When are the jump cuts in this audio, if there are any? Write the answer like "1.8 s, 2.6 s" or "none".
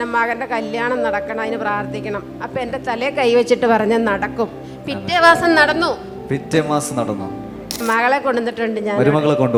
none